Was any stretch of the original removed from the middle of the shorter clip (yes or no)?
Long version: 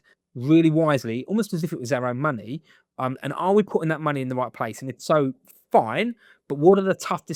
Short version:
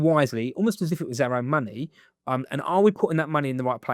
no